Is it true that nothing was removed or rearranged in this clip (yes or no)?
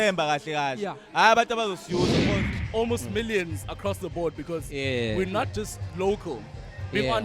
no